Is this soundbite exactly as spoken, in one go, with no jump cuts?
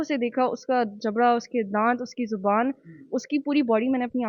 yes; 0 cuts

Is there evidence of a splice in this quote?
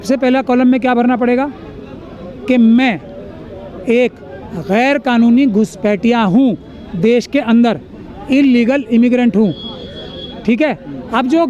no; 0 cuts

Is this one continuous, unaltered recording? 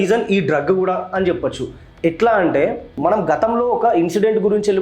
no; 1 cut; at 2.9 s

